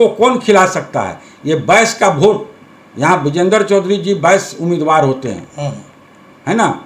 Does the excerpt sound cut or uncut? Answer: uncut